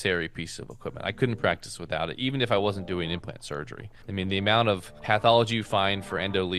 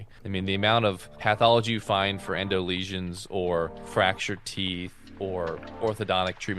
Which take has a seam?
second; 2 cuts; at 3.8 s, 5.2 s

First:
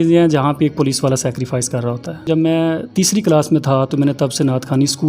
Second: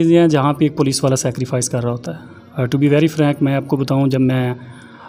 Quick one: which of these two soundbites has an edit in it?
first; 1 cut; at 2.3 s

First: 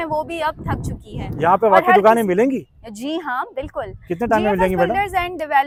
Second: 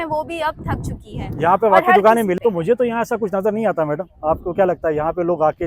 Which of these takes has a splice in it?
second; 1 cut; at 2.4 s

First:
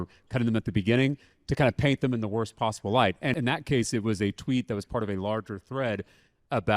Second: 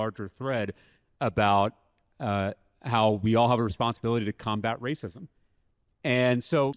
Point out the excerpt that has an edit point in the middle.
first; 2 cuts; at 1.5 s, 3.3 s

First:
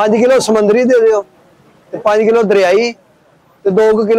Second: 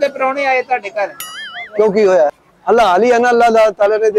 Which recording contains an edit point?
second; 1 cut; at 2.5 s

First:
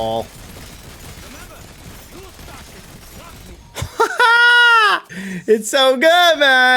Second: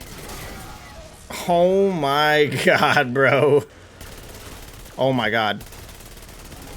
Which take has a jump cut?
second; 1 cut; at 3.7 s

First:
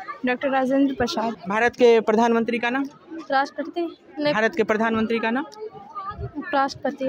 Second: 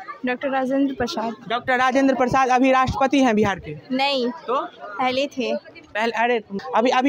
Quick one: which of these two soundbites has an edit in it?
first; 1 cut; at 1.4 s

